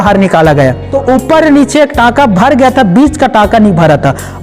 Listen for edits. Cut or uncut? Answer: cut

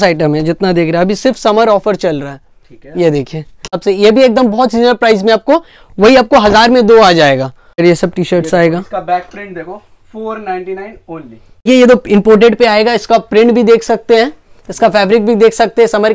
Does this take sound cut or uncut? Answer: cut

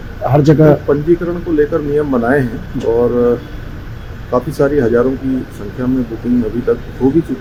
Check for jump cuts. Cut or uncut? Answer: uncut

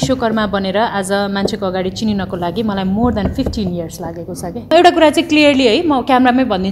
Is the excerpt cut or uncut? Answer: cut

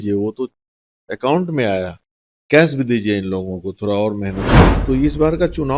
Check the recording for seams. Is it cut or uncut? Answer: cut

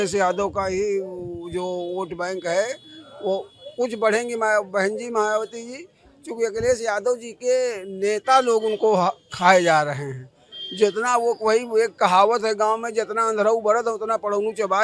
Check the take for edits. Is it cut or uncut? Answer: uncut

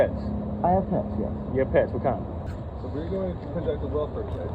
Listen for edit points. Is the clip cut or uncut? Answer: cut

